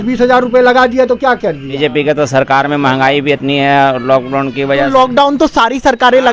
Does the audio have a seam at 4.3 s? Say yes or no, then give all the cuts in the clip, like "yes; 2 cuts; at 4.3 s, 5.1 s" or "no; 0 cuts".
no; 1 cut; at 1.7 s